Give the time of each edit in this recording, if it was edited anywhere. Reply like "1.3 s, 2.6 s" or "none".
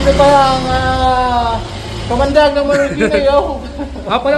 none